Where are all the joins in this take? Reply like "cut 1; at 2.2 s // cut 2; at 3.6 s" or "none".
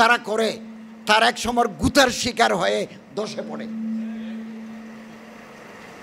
none